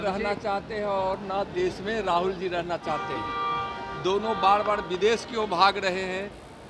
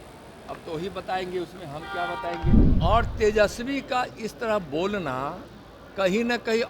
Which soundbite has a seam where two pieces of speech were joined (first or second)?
second